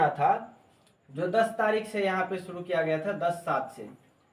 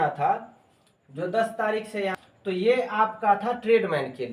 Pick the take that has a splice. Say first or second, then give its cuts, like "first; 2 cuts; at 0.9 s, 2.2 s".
second; 1 cut; at 2.2 s